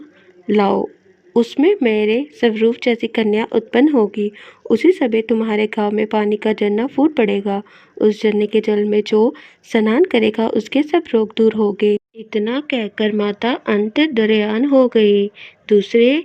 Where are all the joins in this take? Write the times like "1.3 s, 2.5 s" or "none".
12.2 s